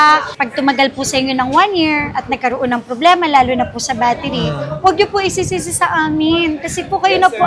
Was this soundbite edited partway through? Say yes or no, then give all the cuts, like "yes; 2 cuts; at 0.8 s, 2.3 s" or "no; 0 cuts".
no; 0 cuts